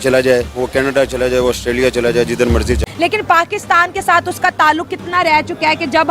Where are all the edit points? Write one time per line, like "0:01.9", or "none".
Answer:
0:02.8

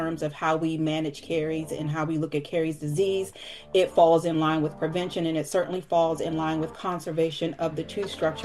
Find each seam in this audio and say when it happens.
none

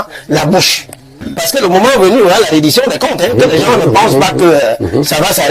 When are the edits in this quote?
0:01.4

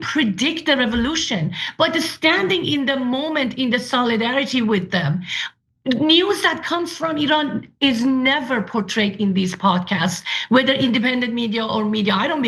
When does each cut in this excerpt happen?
none

